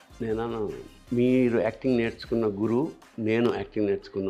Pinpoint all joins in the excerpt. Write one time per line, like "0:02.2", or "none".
0:00.9
0:03.0